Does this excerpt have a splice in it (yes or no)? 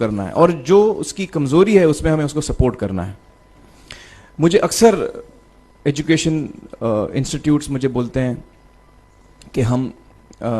no